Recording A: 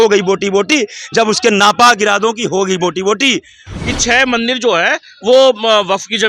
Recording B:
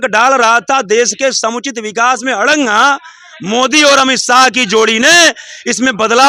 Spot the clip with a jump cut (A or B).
A